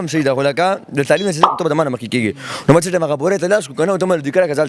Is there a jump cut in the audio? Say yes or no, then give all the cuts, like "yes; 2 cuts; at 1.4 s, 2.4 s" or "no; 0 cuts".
yes; 1 cut; at 1.5 s